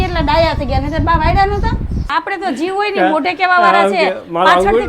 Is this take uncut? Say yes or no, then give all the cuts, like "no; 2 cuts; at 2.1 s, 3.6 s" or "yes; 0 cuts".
no; 1 cut; at 2.1 s